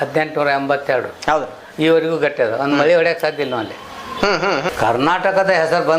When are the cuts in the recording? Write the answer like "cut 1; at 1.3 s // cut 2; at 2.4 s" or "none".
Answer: cut 1; at 4.7 s